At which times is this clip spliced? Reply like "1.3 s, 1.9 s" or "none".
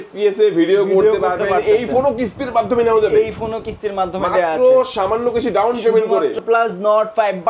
6.3 s